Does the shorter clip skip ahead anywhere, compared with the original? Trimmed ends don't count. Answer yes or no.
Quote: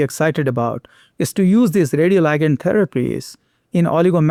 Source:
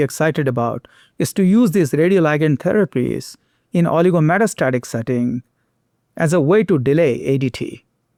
no